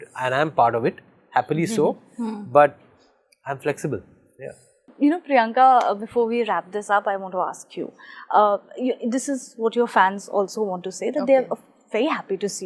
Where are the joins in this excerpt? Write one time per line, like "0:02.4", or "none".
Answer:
none